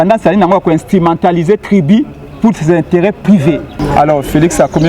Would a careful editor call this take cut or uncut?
cut